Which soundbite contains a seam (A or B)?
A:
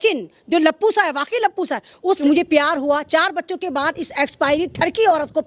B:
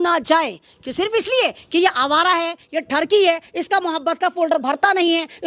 A